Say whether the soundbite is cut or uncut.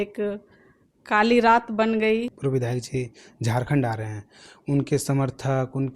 cut